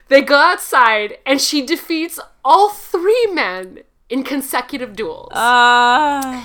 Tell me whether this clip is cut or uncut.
uncut